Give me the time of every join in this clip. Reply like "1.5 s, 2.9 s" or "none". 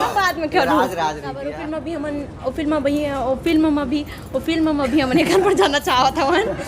1.6 s